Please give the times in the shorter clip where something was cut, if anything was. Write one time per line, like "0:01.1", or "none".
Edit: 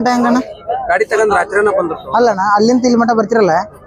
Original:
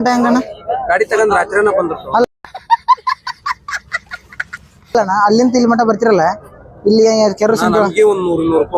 0:02.2